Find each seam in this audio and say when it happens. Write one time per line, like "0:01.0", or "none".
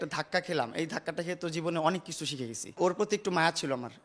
0:02.7

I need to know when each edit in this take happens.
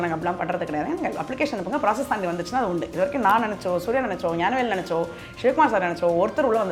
none

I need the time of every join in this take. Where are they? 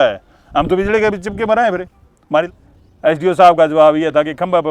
0:02.4

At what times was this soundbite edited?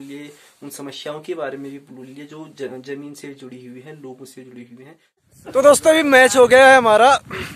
0:05.2

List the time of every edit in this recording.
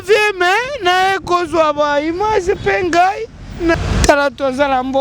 0:03.8

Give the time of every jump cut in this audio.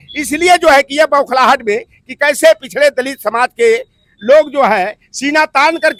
none

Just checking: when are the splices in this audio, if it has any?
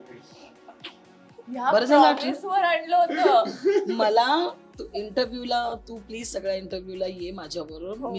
none

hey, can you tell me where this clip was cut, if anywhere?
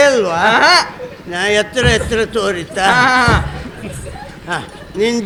none

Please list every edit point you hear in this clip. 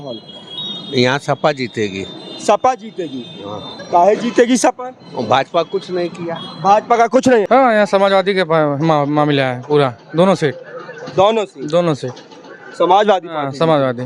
0:07.5

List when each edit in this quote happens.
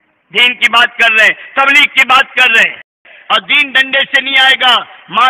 0:03.1

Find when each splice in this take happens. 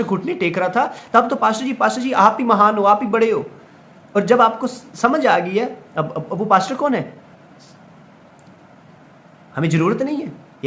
none

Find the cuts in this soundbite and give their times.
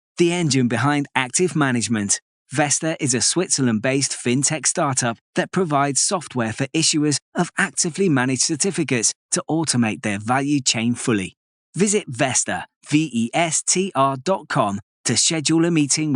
none

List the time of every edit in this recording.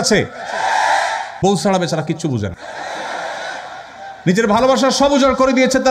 0:01.3
0:02.6

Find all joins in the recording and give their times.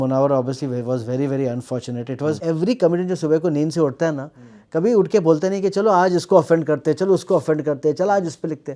0:02.4

